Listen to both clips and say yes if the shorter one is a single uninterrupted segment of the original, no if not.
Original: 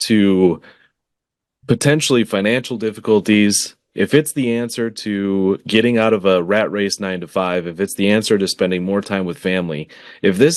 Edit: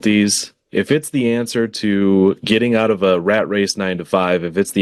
yes